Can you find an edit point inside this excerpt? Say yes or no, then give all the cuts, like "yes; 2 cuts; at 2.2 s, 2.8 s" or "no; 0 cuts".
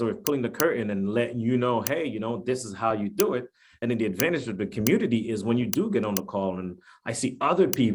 no; 0 cuts